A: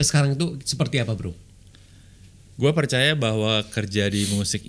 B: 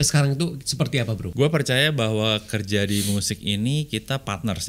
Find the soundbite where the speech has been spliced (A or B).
B